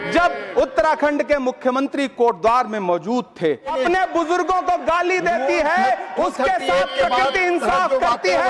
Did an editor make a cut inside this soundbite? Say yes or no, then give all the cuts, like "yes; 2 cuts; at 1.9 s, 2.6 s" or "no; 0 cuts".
yes; 1 cut; at 3.7 s